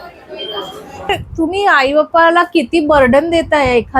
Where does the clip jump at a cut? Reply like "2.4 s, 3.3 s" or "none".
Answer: 1.1 s